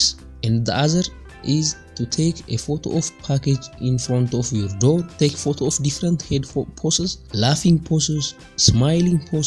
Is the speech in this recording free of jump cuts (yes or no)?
no